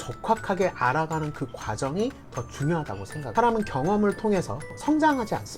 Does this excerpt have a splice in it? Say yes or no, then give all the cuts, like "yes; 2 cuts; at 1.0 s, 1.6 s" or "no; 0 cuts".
yes; 2 cuts; at 3.2 s, 4.7 s